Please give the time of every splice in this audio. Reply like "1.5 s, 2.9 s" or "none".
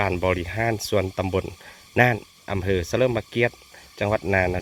none